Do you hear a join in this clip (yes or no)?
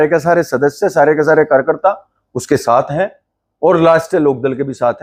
no